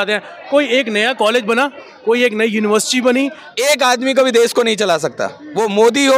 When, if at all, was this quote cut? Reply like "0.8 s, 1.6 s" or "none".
3.4 s